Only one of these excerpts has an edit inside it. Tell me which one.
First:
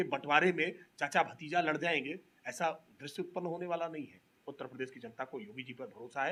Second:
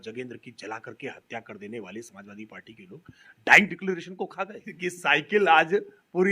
second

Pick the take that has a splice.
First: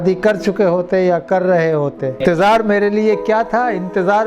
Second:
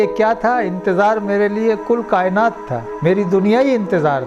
first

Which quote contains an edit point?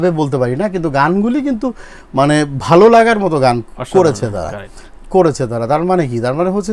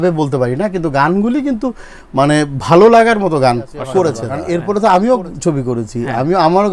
second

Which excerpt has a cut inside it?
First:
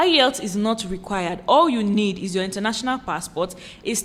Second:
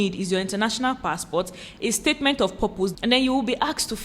second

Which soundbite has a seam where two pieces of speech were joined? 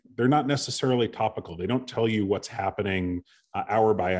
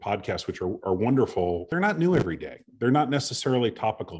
second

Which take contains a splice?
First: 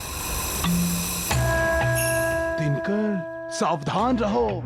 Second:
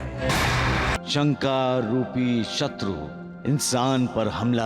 second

